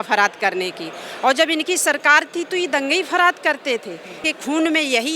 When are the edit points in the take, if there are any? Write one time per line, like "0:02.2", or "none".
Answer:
0:04.2